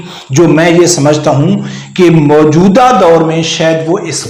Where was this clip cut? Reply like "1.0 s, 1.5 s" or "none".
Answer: none